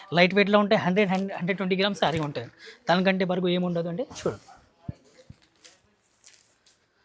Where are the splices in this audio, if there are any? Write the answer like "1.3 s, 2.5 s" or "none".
none